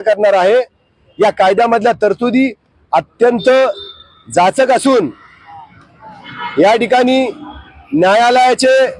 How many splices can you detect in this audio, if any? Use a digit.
0